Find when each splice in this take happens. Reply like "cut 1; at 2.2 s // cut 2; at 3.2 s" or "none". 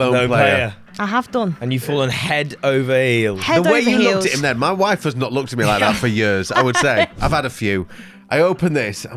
cut 1; at 7.2 s